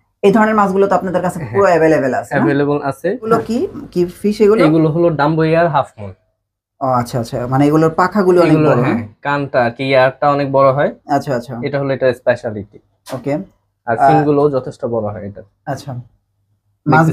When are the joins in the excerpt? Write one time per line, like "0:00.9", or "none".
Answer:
none